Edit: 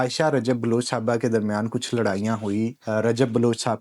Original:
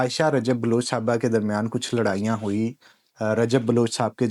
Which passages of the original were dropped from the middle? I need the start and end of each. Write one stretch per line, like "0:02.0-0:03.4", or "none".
0:02.8-0:03.1